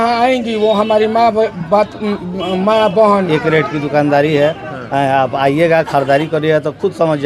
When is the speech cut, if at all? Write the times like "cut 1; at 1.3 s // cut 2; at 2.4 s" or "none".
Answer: cut 1; at 3.3 s